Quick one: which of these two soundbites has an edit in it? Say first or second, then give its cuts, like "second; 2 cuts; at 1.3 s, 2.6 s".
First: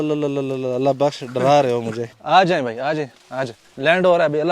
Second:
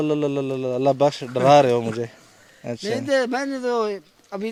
first; 1 cut; at 2.1 s